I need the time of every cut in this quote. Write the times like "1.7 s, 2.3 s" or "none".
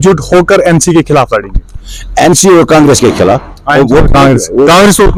none